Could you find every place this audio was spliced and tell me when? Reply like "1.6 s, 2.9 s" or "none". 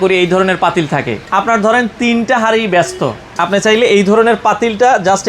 1.2 s